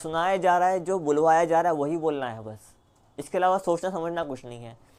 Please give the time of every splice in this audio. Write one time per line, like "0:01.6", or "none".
none

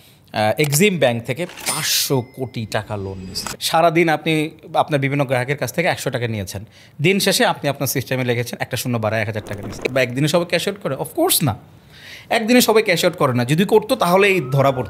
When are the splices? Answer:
0:03.0
0:09.8

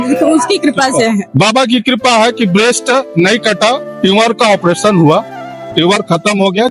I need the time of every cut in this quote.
0:01.3

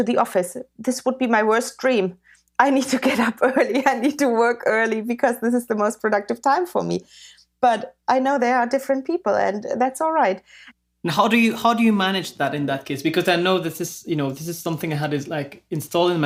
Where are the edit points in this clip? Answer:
none

